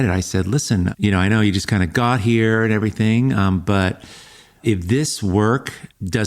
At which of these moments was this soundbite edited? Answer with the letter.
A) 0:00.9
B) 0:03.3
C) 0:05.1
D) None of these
A